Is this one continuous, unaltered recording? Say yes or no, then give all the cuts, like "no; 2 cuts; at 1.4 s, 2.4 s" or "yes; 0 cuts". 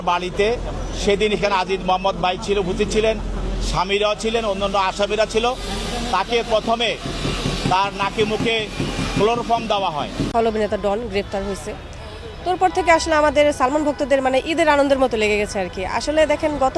no; 1 cut; at 10.3 s